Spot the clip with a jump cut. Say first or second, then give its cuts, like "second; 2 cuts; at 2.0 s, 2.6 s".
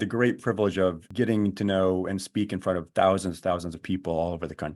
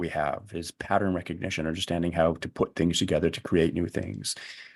first; 1 cut; at 1.0 s